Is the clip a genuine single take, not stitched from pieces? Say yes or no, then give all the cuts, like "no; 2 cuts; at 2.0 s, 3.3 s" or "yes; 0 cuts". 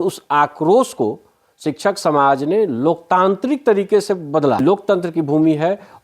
no; 1 cut; at 4.7 s